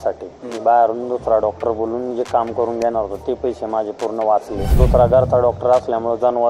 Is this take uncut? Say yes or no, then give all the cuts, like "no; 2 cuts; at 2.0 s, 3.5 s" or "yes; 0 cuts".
no; 1 cut; at 4.6 s